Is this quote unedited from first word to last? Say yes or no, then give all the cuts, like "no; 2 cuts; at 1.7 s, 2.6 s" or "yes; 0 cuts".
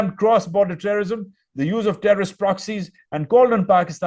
yes; 0 cuts